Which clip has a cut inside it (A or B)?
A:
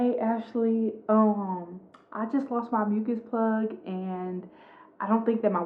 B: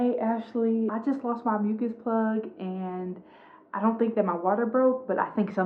B